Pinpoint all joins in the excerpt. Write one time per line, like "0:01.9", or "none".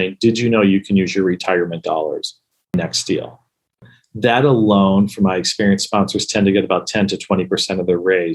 0:03.8